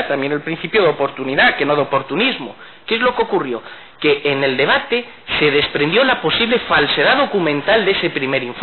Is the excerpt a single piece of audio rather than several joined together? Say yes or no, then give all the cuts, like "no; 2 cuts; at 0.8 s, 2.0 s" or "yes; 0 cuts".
yes; 0 cuts